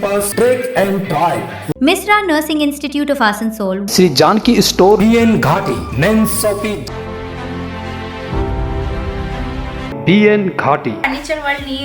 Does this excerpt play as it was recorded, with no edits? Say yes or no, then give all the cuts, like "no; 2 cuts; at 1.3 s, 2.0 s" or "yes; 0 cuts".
yes; 0 cuts